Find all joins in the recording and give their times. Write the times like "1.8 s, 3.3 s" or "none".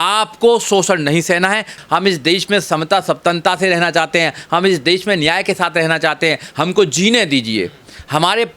1.7 s